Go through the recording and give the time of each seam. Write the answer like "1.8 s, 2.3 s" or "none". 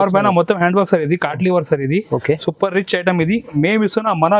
none